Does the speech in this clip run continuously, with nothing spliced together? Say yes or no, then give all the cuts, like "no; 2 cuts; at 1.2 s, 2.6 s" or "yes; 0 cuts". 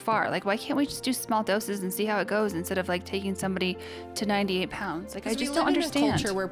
yes; 0 cuts